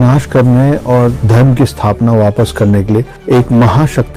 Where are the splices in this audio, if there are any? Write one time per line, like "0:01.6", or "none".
0:03.1